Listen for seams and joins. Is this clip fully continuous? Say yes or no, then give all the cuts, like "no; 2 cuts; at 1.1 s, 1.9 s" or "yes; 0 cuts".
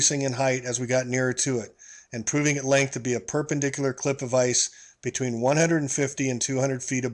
no; 1 cut; at 5.5 s